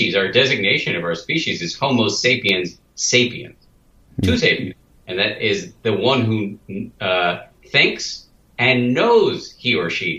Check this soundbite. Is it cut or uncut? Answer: uncut